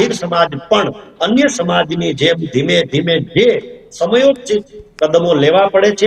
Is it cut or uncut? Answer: uncut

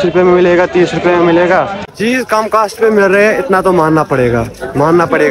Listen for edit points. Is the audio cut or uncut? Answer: cut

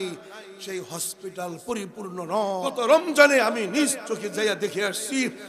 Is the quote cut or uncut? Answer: cut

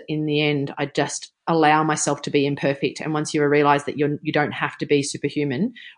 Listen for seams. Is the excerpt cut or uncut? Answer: cut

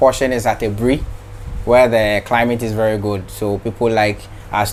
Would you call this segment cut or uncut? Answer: uncut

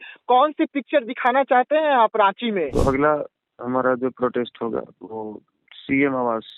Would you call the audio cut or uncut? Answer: cut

